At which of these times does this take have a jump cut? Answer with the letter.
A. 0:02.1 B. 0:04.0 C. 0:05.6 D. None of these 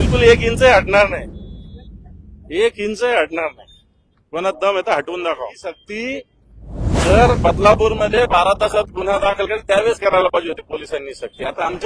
C